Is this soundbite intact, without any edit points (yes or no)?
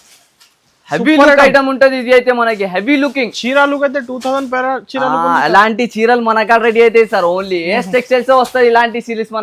yes